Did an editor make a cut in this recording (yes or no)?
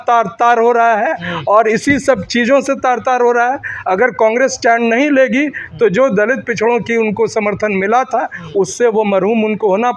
no